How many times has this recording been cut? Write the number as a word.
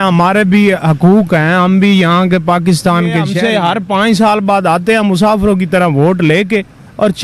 one